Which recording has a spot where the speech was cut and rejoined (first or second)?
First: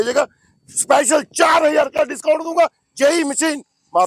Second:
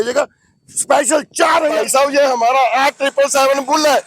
second